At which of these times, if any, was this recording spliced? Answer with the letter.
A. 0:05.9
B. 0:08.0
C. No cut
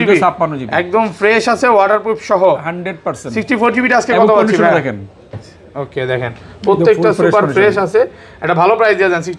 C